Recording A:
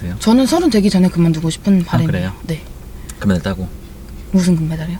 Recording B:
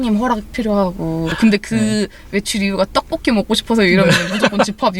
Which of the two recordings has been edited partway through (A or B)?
B